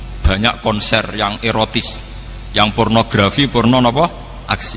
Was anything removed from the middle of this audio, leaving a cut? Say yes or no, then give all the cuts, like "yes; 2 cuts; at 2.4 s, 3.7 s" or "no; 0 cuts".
no; 0 cuts